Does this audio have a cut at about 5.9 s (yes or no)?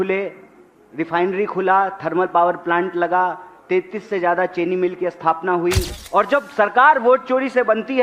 yes